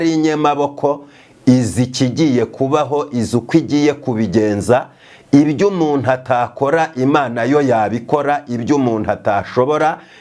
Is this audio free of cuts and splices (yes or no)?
yes